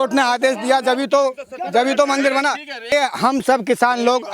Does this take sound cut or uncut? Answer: cut